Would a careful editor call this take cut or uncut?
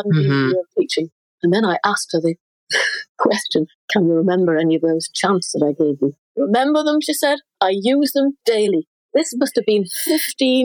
cut